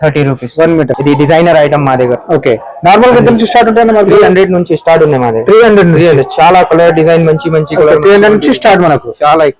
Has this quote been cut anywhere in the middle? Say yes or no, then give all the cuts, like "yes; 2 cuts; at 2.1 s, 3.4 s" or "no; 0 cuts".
yes; 1 cut; at 0.9 s